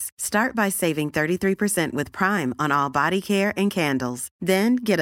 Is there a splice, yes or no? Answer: no